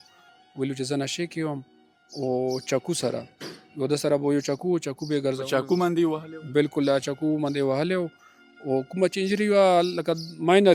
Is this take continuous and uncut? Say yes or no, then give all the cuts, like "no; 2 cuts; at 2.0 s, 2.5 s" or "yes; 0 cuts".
yes; 0 cuts